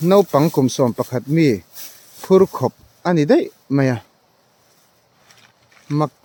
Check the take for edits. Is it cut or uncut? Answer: uncut